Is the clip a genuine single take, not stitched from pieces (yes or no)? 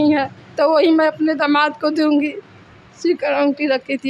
yes